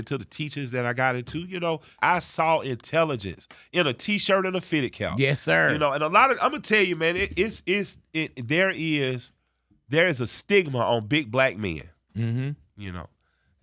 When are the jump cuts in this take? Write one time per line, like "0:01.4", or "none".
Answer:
0:02.0